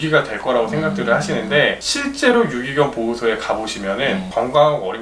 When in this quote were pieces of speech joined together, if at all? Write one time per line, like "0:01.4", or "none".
none